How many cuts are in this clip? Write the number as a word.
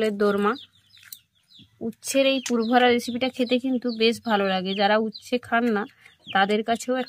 zero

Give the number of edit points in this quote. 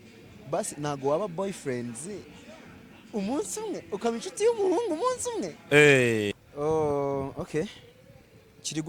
one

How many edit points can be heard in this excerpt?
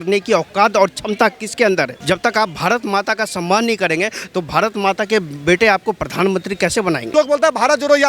two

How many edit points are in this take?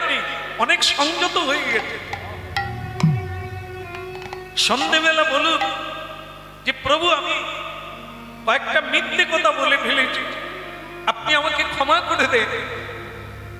zero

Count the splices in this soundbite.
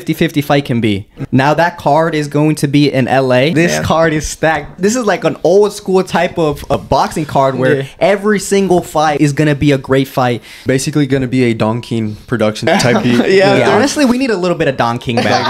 seven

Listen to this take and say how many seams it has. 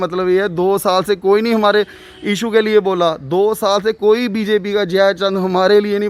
zero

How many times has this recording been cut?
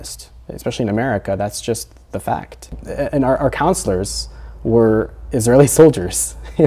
one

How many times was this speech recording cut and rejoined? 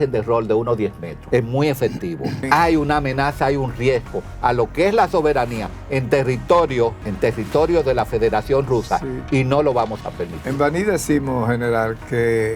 three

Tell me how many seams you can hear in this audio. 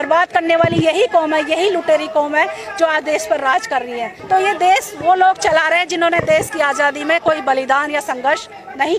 one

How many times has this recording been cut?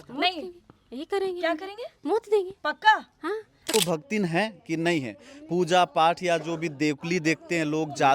one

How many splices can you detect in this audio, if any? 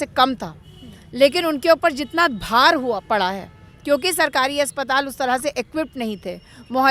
zero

